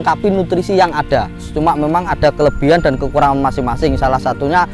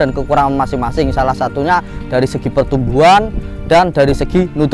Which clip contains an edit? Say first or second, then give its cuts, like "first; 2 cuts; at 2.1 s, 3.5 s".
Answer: first; 1 cut; at 1.5 s